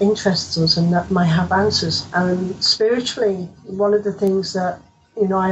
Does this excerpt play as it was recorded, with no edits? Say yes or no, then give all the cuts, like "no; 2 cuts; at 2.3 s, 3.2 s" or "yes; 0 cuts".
no; 1 cut; at 2.0 s